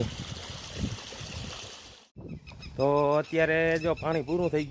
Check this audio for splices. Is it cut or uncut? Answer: cut